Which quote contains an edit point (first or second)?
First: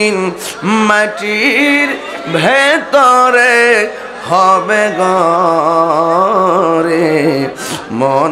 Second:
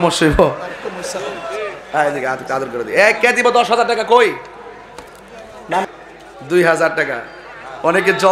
second